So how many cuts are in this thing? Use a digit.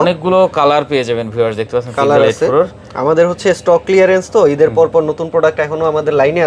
0